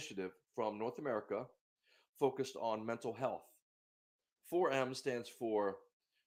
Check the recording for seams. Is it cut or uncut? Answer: uncut